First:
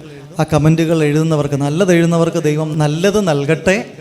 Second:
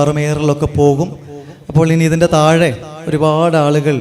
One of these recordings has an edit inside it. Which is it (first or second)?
first